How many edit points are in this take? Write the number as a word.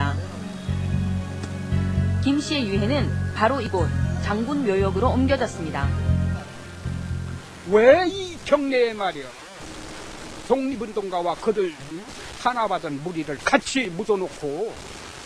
one